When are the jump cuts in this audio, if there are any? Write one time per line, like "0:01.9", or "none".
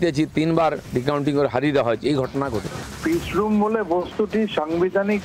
0:02.8